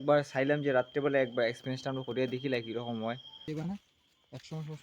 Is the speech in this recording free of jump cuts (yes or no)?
no